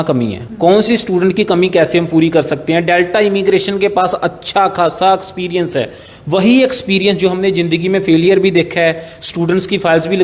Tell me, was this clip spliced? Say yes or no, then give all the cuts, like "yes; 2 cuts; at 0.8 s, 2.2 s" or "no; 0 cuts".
no; 0 cuts